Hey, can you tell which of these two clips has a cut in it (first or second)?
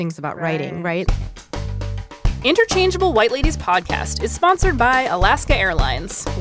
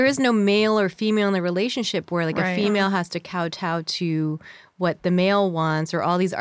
first